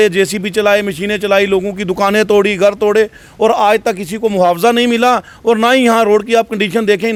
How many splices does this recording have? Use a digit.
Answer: 0